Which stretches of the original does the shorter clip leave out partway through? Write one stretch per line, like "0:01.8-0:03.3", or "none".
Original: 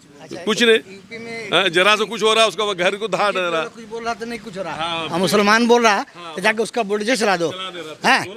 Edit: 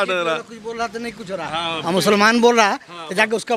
none